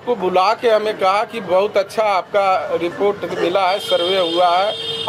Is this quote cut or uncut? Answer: uncut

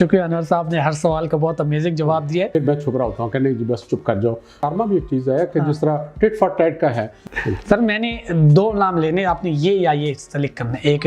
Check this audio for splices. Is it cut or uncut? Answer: cut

